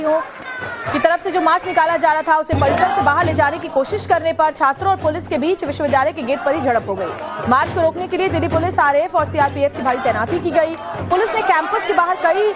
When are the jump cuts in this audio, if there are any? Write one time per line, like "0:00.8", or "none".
none